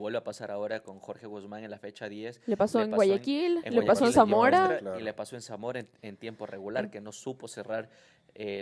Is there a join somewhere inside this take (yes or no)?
no